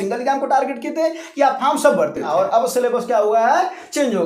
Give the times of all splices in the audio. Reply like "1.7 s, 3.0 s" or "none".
2.2 s